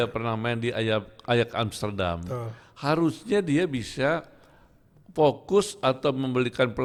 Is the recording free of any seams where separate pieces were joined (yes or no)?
yes